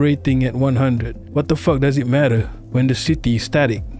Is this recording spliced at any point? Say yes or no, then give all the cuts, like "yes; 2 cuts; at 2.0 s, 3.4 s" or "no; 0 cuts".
yes; 2 cuts; at 1.2 s, 2.6 s